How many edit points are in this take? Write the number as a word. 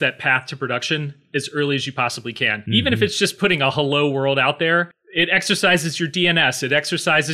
two